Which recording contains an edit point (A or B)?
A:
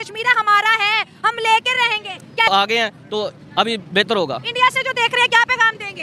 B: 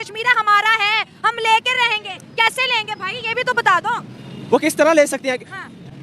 A